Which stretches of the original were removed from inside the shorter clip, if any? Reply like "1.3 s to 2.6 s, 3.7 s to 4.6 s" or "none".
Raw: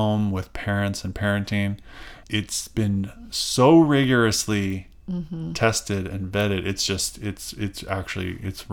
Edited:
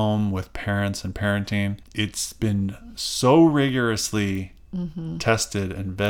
1.8 s to 2.2 s